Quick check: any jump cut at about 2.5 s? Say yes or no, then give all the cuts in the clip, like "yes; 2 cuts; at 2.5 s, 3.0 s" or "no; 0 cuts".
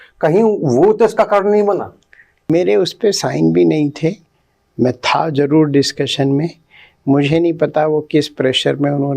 yes; 1 cut; at 2.5 s